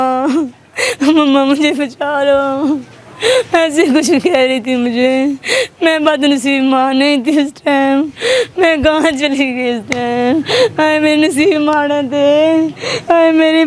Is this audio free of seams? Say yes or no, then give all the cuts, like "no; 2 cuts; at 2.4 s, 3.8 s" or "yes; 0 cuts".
yes; 0 cuts